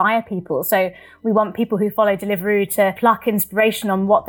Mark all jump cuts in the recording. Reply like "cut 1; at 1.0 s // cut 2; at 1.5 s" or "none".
cut 1; at 3.0 s